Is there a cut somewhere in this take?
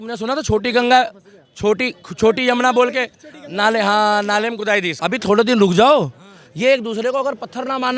yes; 1 cut; at 4.9 s

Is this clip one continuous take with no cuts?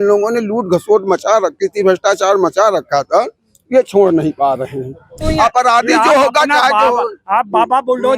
no; 1 cut; at 5.2 s

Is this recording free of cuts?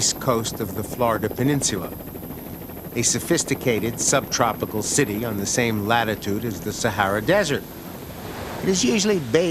no; 1 cut; at 6.2 s

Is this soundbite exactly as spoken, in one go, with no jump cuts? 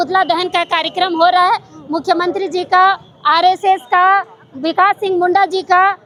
yes; 0 cuts

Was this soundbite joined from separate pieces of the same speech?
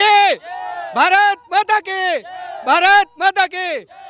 no; 0 cuts

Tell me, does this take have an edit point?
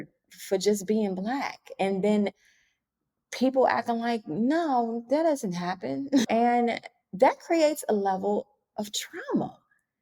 no; 0 cuts

